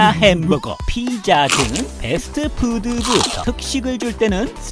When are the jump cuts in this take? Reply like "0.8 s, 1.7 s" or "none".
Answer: 3.4 s